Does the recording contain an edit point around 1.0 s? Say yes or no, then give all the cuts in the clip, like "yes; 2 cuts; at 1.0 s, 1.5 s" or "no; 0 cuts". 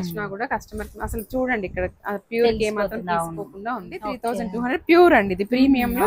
no; 1 cut; at 4.1 s